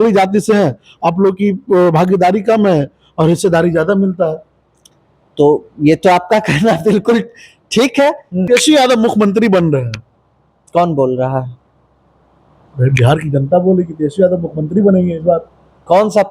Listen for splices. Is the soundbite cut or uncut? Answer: cut